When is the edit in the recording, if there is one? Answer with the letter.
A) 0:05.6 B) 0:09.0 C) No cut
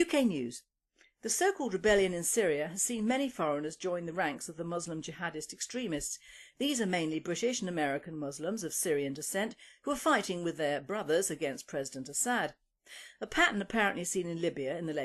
C